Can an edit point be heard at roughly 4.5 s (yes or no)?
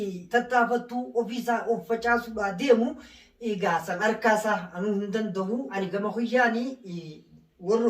no